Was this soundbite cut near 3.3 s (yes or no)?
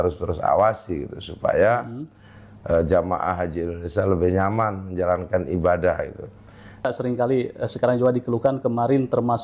no